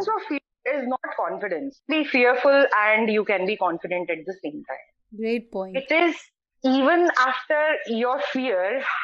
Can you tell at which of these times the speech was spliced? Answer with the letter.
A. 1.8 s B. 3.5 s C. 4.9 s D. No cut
A